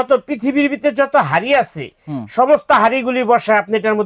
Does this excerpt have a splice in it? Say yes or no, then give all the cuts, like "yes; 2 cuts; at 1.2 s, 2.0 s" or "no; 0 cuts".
no; 0 cuts